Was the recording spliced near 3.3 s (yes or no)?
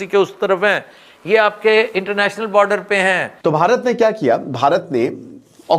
yes